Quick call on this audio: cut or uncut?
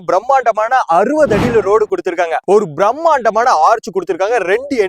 cut